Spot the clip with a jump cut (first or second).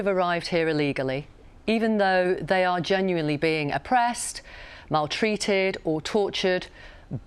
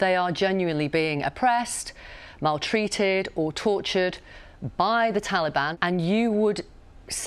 second